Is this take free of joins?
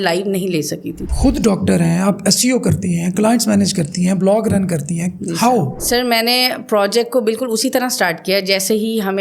no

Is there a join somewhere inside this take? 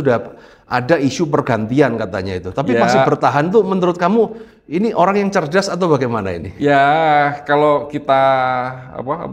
no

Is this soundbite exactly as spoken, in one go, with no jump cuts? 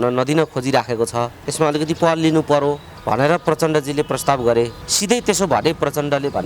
no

